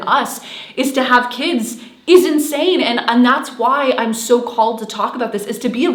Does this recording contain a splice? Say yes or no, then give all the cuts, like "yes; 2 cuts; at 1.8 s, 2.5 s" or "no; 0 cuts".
no; 0 cuts